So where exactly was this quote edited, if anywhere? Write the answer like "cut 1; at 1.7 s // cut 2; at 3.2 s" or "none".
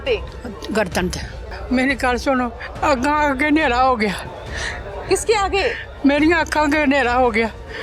cut 1; at 1.5 s